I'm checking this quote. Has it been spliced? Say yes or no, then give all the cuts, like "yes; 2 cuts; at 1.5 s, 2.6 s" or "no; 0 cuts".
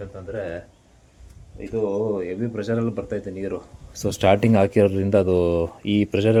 no; 0 cuts